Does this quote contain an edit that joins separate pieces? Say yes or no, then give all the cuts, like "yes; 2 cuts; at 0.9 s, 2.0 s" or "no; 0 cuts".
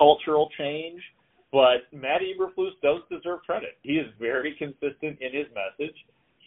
yes; 2 cuts; at 1.9 s, 3.8 s